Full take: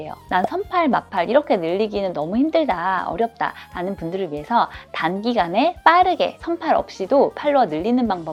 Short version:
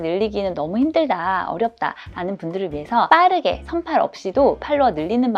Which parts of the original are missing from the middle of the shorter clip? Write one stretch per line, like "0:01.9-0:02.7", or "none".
0:04.7-0:05.8

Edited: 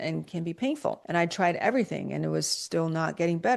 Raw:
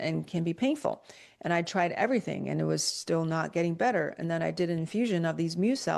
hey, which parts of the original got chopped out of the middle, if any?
0:01.0-0:01.4

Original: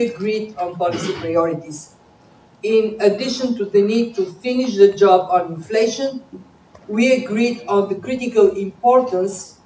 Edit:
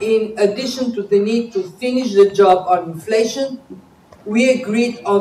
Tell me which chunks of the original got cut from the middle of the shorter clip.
none

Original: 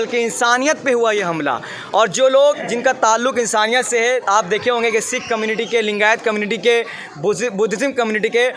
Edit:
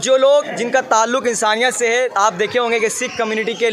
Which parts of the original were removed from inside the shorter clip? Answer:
none

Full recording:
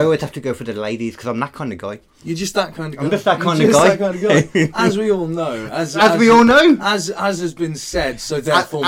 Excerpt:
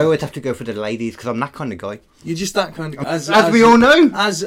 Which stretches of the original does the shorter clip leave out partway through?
0:03.0-0:05.6

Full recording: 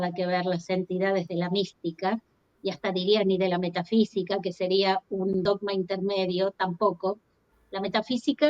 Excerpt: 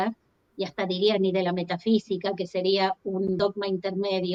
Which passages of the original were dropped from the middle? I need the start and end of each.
none

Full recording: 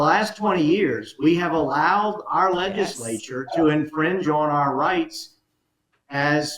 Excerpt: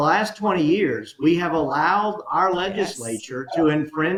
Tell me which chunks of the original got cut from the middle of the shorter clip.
none

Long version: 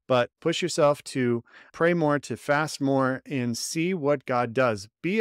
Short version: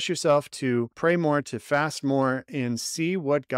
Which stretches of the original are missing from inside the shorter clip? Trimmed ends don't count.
0:01.5-0:01.7

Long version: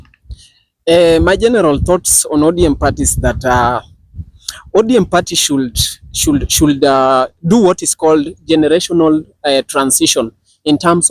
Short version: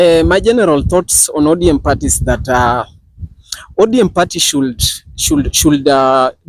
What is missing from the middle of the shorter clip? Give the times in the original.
none

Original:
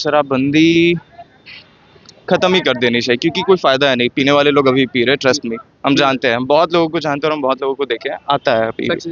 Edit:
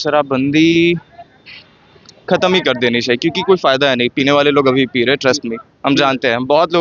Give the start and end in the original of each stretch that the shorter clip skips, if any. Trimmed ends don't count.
none

